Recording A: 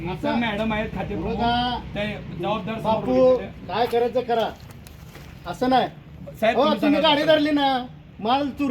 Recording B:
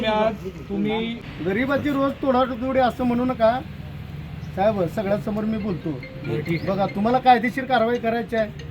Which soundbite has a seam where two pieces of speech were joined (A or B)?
B